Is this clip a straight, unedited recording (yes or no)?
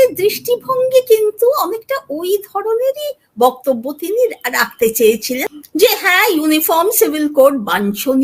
no